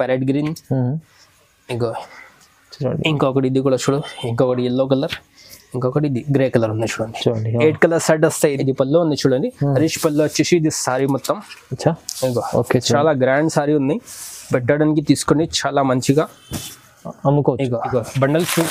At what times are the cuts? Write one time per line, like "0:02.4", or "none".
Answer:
0:08.6
0:17.9